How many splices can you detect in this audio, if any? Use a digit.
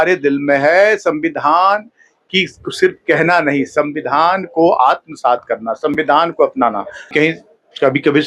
1